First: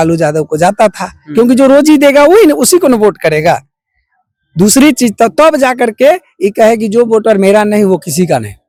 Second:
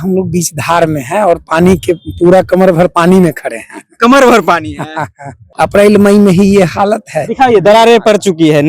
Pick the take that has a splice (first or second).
second